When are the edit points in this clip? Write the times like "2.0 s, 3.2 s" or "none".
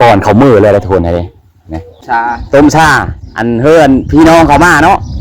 2.0 s